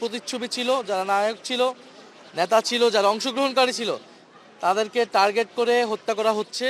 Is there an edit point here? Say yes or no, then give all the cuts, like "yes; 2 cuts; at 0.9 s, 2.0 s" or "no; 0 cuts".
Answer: no; 0 cuts